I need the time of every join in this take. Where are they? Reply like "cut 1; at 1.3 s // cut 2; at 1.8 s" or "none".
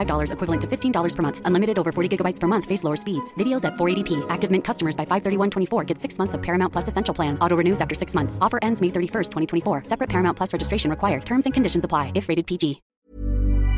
cut 1; at 12.9 s